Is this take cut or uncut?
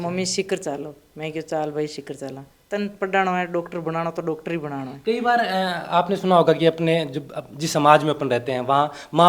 uncut